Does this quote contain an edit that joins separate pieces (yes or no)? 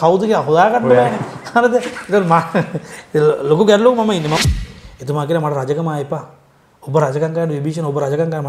yes